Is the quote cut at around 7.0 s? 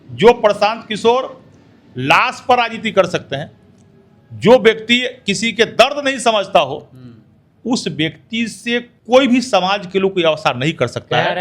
no; 1 cut; at 8.9 s

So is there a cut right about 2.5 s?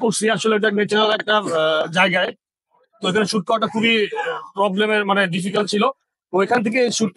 no; 0 cuts

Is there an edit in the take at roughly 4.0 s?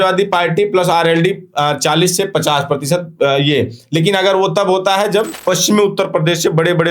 no; 1 cut; at 5.3 s

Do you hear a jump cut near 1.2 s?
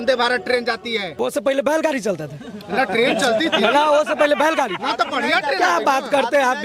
yes; 1 cut; at 1.2 s

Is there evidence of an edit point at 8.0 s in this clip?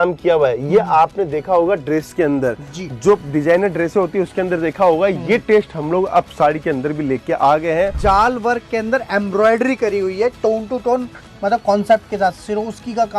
yes; 1 cut; at 8.0 s

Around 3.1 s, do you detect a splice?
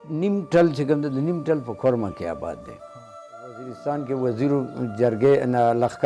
yes; 1 cut; at 3.1 s

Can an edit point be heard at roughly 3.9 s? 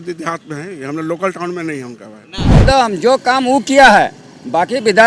no; 1 cut; at 2.6 s

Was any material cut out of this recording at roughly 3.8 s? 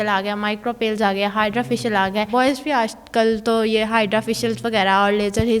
no; 1 cut; at 2.3 s

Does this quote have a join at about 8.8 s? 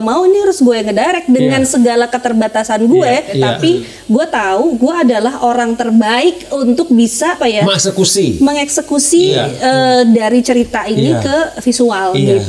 no; 2 cuts; at 3.3 s, 7.4 s

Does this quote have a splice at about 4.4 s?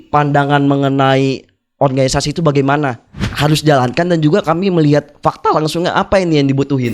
no; 1 cut; at 3.2 s

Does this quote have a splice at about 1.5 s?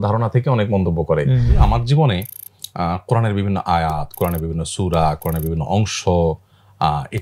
yes; 1 cut; at 1.5 s

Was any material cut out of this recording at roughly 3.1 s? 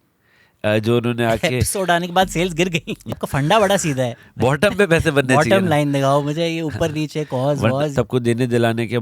yes; 2 cuts; at 3.1 s, 7.9 s

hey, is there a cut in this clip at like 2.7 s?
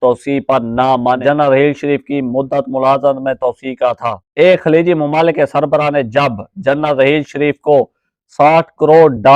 no; 2 cuts; at 1.2 s, 4.1 s

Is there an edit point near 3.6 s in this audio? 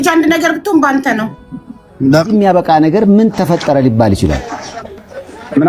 no; 1 cut; at 2.3 s

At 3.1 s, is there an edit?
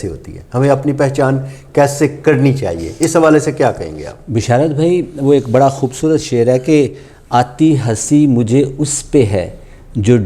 no; 0 cuts

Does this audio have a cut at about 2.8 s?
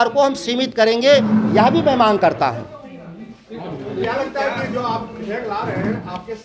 no; 0 cuts

